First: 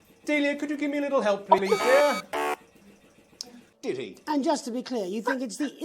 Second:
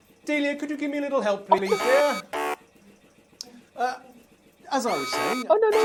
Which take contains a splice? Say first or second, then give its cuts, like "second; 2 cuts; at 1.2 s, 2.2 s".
first; 1 cut; at 3.7 s